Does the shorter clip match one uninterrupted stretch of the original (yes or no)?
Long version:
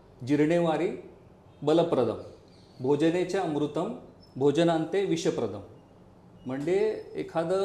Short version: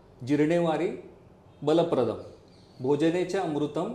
yes